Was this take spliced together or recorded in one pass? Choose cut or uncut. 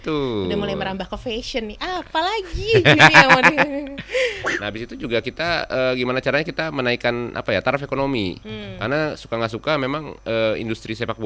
cut